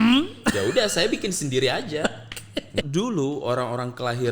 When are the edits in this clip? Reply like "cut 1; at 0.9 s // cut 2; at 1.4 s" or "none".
cut 1; at 2.7 s